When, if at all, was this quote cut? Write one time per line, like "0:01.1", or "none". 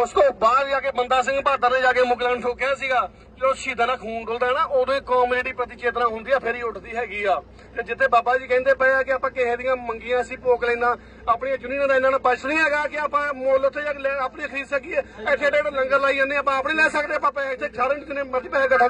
none